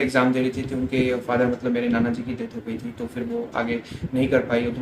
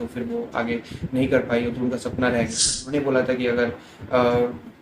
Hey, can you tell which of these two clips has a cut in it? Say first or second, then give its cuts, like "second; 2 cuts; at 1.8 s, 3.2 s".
second; 1 cut; at 2.9 s